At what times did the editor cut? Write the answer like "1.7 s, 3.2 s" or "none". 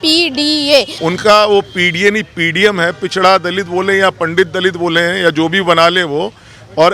0.9 s